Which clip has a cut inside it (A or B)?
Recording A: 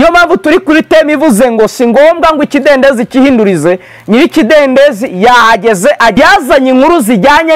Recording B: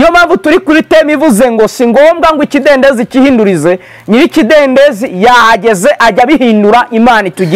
A